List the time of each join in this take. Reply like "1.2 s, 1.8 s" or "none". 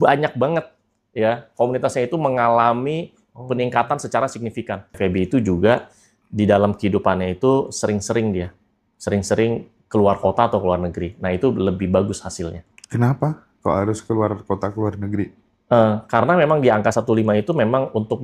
4.9 s